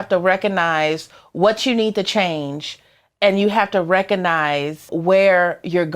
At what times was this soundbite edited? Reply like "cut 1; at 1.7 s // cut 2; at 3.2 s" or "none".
cut 1; at 4.9 s